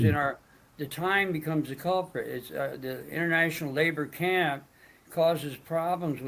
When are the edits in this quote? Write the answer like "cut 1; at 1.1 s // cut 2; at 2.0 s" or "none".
none